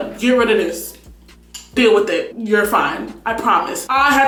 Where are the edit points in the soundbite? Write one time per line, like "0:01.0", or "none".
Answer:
none